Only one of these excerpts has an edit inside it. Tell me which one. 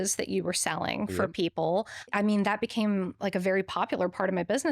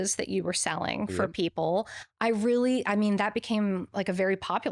first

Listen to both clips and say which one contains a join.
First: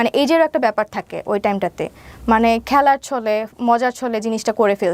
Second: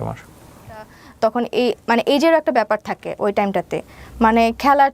second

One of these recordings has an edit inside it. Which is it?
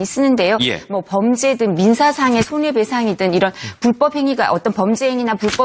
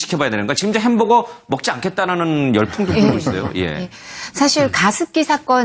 second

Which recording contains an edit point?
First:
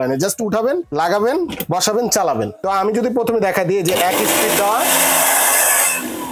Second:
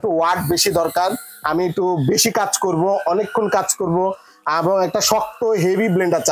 first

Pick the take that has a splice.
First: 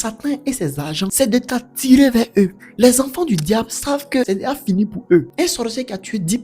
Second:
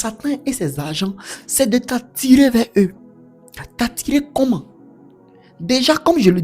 first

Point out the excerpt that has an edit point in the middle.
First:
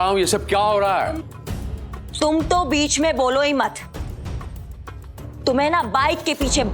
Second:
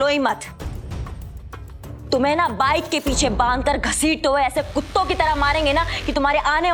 first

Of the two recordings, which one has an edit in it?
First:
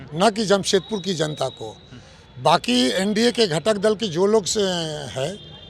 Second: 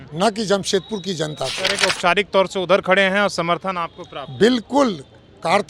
second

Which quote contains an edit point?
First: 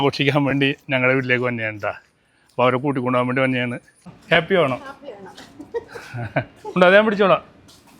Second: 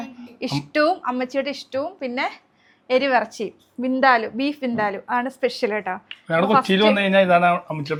first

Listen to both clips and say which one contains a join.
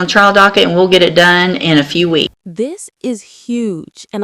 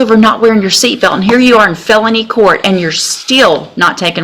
first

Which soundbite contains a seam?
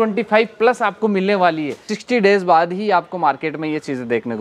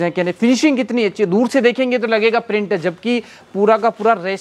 first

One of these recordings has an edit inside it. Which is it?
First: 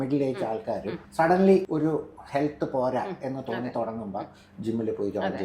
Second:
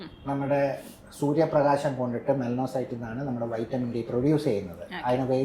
first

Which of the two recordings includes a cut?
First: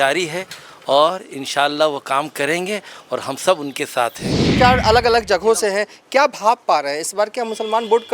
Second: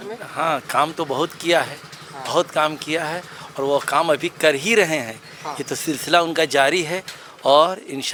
first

